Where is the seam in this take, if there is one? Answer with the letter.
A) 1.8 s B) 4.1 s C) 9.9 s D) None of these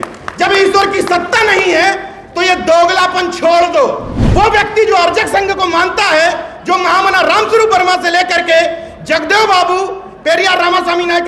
B